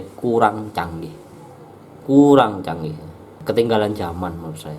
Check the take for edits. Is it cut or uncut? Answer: cut